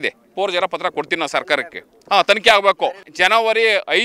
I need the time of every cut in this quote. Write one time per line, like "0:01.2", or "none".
0:03.1